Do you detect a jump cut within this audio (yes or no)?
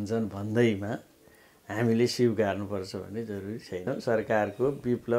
yes